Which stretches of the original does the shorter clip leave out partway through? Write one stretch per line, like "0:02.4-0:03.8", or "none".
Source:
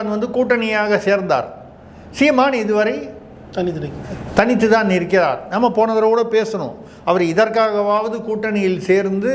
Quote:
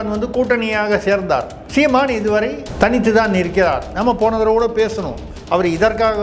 0:01.6-0:02.0
0:03.1-0:04.2

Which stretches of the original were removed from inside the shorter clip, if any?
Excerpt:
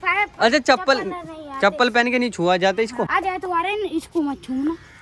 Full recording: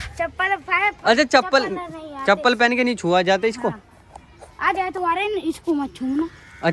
0:03.7-0:04.6

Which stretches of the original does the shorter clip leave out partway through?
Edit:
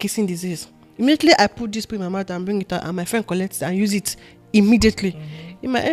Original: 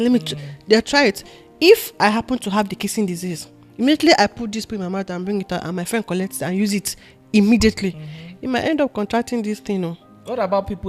none

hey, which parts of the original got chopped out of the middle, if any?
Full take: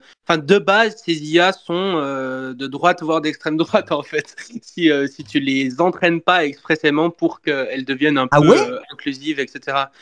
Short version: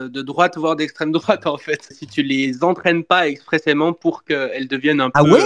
0:04.5-0:05.2

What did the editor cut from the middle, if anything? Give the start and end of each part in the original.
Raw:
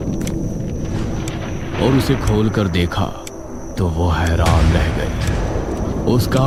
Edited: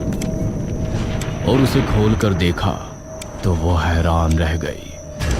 0:01.4-0:01.7

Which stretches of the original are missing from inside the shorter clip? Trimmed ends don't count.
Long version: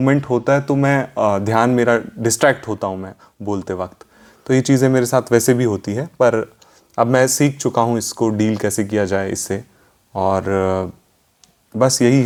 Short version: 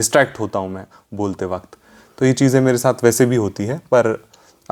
none

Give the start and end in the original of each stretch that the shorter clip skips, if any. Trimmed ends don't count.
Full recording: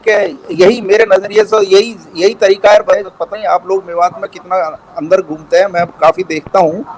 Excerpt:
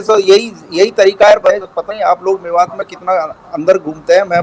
none

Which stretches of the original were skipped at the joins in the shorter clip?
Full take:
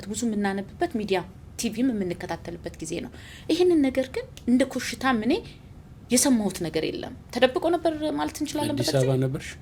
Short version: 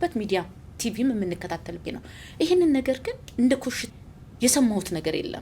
0:02.6-0:02.9
0:04.9-0:05.5

